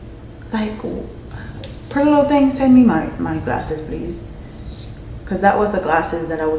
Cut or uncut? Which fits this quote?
uncut